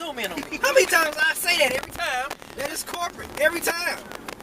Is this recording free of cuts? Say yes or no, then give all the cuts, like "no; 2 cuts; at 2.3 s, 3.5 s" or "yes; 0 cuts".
yes; 0 cuts